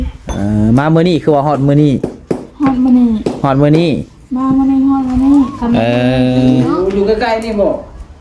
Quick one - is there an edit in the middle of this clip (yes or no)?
no